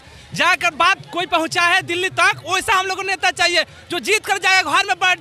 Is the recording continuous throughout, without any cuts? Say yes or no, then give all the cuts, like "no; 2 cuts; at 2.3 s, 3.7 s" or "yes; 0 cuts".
yes; 0 cuts